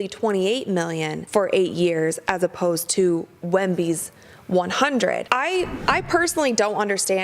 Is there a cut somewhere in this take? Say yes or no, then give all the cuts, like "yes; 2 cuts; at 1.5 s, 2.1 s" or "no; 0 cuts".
yes; 1 cut; at 5.8 s